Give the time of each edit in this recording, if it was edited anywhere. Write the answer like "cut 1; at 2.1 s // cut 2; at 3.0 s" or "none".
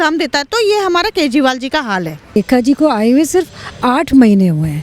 cut 1; at 2.4 s